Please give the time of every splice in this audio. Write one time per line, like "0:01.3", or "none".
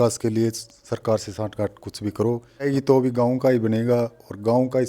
0:02.7